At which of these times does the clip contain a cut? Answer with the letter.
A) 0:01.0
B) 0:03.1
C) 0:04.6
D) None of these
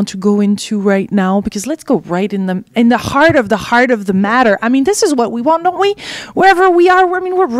D